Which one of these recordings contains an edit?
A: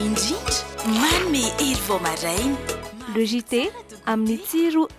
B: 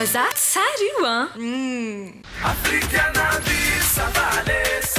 B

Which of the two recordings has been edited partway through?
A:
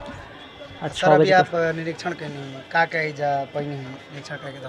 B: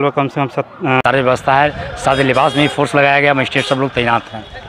B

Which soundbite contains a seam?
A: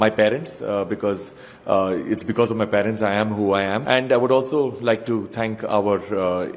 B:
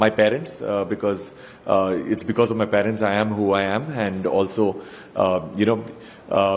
A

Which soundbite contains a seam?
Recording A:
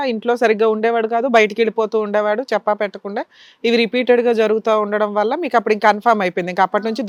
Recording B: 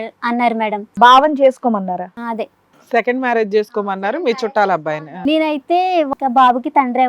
B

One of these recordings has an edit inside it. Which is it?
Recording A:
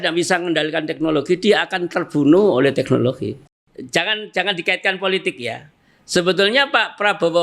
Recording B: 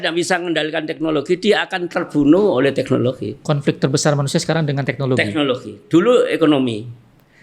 A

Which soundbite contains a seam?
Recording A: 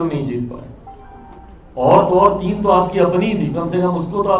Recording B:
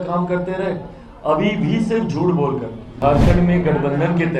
B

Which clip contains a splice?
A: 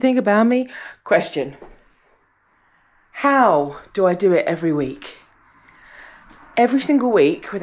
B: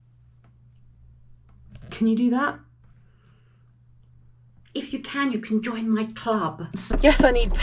B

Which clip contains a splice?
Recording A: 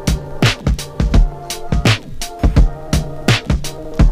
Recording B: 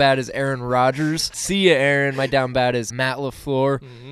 B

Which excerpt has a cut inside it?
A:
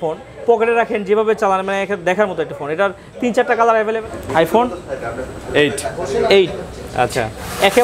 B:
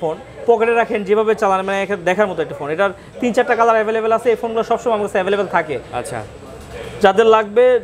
A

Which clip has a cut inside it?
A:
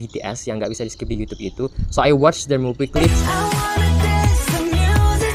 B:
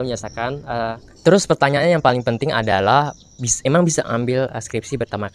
B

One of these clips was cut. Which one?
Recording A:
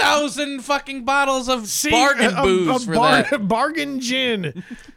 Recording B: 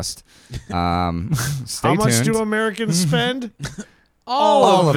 A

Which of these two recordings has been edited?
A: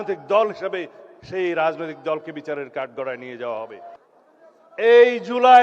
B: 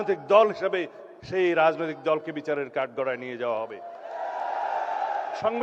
A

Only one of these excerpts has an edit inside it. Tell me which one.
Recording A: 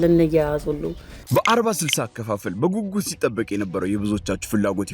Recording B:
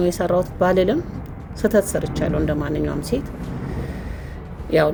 A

